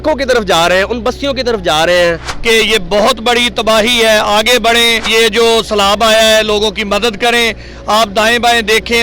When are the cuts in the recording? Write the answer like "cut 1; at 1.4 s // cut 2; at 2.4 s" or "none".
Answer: cut 1; at 2.3 s